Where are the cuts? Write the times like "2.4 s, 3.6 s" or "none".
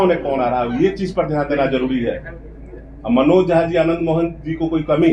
none